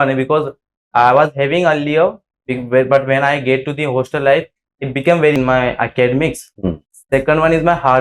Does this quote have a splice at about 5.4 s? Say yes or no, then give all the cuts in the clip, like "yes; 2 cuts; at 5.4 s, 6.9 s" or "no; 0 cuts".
yes; 1 cut; at 5.4 s